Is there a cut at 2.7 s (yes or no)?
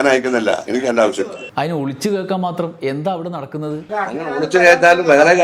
no